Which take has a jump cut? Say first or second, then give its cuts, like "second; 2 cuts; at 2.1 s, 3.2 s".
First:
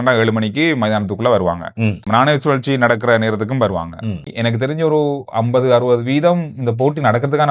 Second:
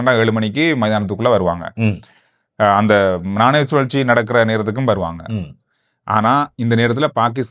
first; 2 cuts; at 2.0 s, 4.3 s